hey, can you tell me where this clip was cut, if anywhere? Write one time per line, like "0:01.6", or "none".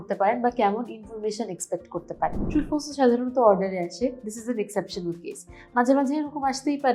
0:02.4

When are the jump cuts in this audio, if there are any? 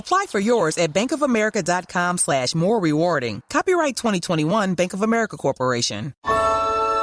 0:06.1

